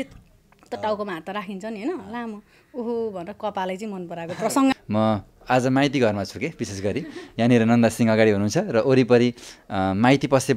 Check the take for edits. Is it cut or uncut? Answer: cut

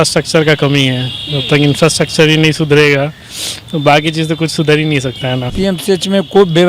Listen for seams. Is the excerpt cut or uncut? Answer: cut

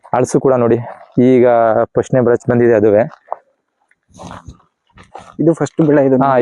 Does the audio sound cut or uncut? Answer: uncut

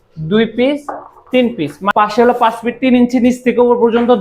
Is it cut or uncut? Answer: cut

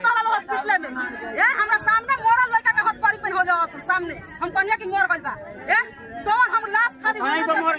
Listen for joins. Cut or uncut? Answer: uncut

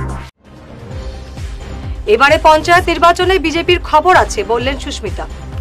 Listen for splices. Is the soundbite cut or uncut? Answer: cut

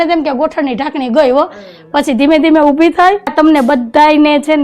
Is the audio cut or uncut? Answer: cut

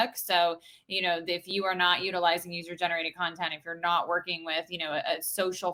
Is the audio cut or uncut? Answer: uncut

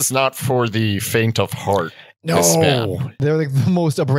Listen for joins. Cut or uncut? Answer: cut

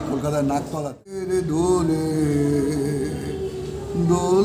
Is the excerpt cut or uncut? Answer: cut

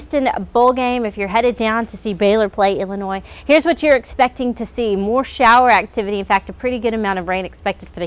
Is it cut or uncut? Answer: uncut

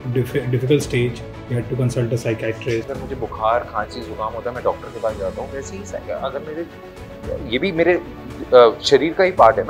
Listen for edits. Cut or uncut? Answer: cut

